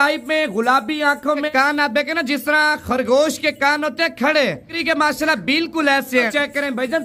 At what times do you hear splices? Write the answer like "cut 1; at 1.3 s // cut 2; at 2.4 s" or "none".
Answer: cut 1; at 1.5 s // cut 2; at 4.7 s // cut 3; at 6.3 s